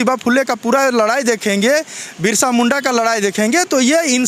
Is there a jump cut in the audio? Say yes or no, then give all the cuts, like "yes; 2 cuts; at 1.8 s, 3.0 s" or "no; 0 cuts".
no; 0 cuts